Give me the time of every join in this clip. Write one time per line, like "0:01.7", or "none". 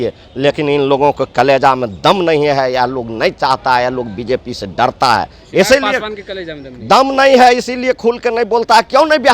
none